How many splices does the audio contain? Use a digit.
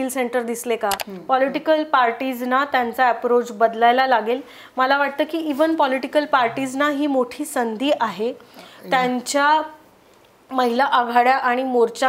1